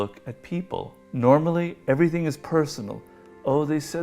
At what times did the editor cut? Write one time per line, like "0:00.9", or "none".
0:01.0